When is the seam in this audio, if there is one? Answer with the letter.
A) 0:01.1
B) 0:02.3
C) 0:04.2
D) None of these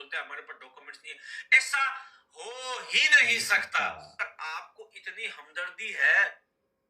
C